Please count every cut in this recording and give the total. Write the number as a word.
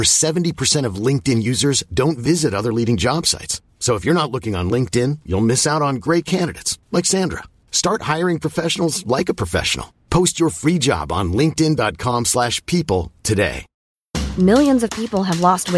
zero